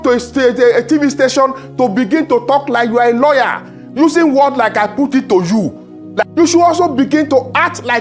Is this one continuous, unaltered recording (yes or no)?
no